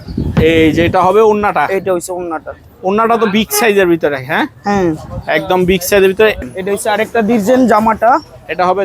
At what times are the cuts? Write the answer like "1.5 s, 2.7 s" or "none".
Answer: 6.4 s